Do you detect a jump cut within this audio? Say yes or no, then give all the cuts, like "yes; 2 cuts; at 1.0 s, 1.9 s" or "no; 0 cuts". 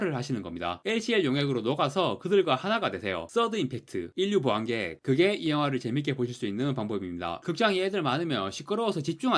no; 0 cuts